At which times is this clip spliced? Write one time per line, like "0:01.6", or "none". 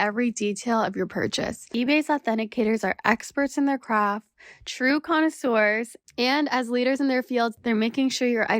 0:01.6